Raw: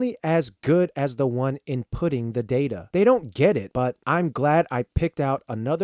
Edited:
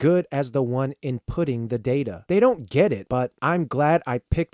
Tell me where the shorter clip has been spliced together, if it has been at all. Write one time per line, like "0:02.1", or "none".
none

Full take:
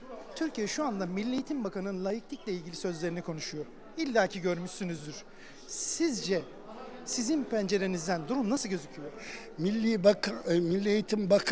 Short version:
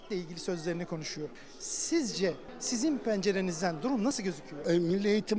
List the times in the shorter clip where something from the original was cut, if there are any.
0:01.4
0:02.5
0:04.5

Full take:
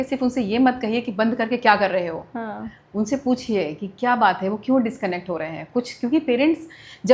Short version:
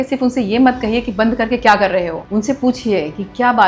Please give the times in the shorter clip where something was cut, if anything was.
0:02.2

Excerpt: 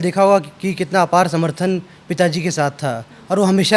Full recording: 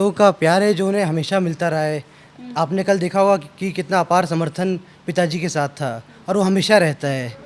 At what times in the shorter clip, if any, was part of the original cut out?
none

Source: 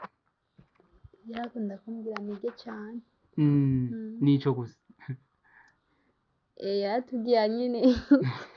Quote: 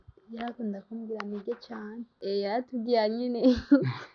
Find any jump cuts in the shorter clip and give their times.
0:02.1

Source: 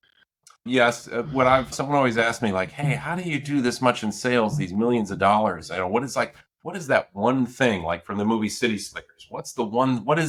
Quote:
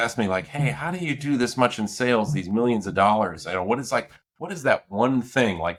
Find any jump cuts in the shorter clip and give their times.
none

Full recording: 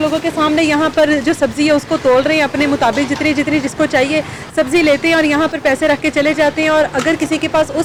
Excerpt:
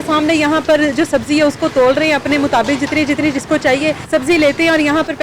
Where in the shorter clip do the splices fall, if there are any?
0:04.0

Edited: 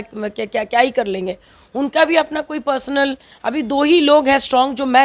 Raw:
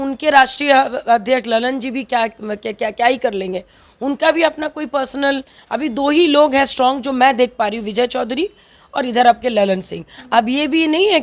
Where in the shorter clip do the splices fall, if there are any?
none

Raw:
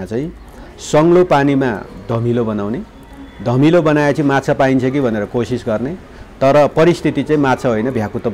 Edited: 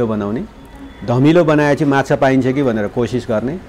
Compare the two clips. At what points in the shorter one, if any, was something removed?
none

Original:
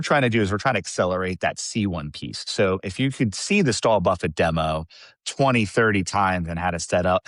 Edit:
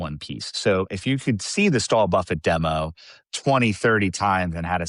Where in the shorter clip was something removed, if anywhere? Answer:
none

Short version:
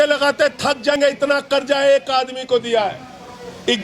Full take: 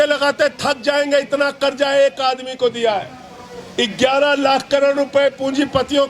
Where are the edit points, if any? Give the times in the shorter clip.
0:00.9

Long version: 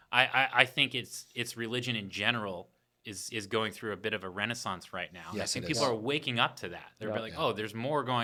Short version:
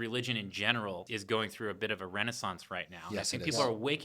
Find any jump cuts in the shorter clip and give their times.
0:01.0

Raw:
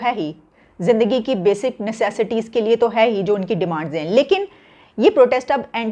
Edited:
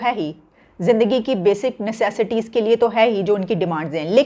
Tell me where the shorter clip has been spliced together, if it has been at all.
none

